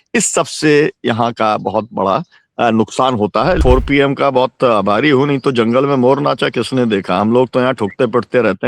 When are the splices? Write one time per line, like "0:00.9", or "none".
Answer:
0:03.6